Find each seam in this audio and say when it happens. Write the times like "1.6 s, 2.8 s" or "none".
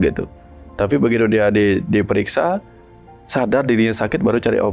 none